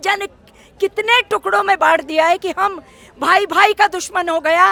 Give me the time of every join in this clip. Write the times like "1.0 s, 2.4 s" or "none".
none